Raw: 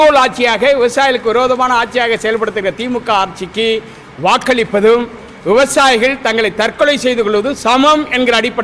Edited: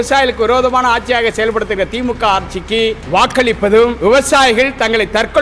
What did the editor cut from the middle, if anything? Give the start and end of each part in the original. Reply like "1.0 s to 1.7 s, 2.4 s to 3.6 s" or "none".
3.9 s to 4.1 s, 5.1 s to 5.4 s